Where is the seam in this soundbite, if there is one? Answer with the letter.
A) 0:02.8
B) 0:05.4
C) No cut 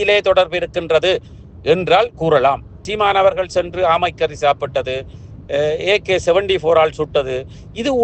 A